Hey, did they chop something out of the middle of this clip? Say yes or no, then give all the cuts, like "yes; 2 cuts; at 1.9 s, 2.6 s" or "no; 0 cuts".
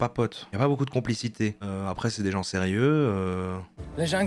no; 0 cuts